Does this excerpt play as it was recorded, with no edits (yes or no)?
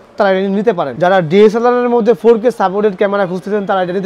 no